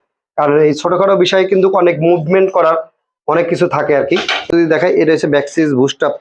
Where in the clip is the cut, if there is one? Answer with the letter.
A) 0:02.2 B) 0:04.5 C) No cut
B